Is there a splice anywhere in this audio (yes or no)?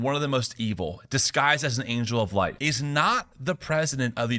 yes